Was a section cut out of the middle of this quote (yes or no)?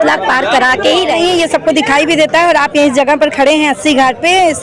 yes